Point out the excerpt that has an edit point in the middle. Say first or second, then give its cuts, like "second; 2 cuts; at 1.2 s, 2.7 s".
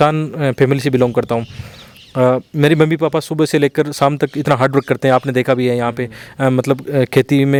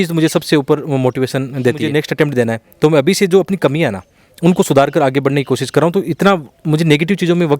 second; 1 cut; at 1.8 s